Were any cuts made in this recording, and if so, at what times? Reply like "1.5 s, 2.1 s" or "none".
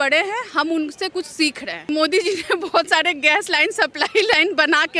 1.9 s